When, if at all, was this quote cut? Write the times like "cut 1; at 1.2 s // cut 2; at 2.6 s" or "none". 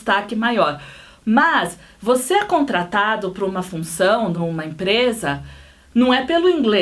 cut 1; at 4.4 s